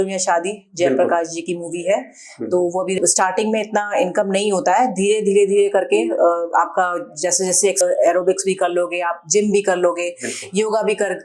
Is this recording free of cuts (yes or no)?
no